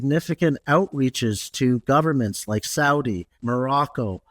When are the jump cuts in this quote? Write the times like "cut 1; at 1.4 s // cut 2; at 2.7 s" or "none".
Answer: cut 1; at 3.3 s